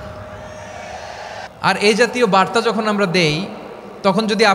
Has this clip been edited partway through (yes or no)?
yes